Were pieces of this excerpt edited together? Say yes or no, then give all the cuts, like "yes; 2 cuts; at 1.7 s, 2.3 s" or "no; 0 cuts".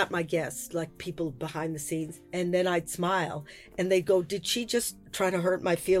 yes; 1 cut; at 5.0 s